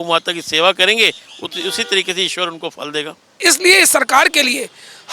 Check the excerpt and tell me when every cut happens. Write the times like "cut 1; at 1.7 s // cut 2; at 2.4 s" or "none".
cut 1; at 3.3 s